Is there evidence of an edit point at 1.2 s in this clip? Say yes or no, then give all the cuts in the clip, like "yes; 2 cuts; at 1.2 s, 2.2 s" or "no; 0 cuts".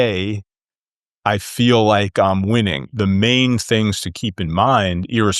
no; 1 cut; at 2.8 s